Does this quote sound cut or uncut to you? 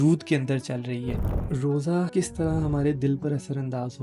cut